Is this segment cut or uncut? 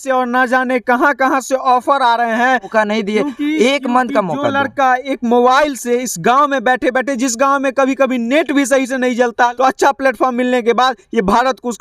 cut